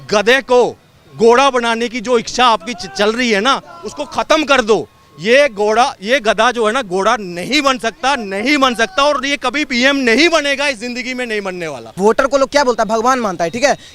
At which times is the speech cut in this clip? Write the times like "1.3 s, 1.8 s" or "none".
11.8 s